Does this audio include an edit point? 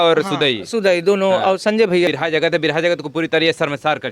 yes; 1 cut; at 2.1 s

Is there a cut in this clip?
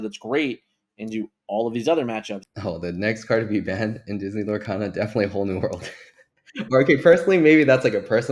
yes; 1 cut; at 2.4 s

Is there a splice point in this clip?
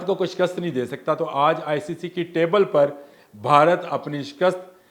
no; 0 cuts

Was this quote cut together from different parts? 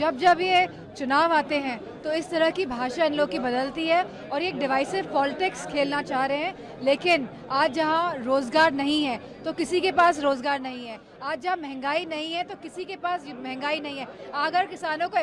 no; 0 cuts

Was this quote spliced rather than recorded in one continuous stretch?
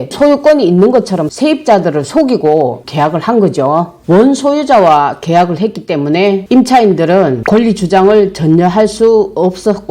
yes; 1 cut; at 4.0 s

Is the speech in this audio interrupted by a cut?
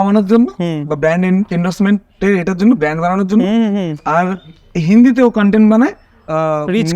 no; 0 cuts

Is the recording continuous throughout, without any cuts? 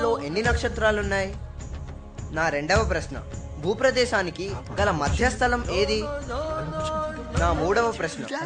yes; 0 cuts

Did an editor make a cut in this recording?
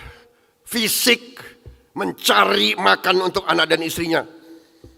no; 0 cuts

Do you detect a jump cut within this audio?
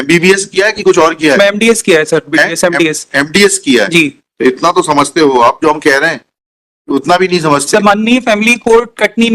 no; 0 cuts

